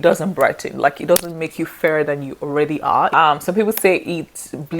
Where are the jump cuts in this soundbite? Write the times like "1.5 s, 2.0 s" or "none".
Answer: 3.1 s